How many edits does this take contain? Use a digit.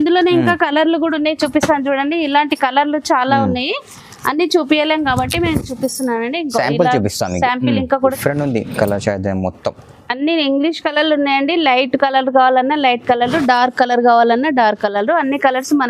1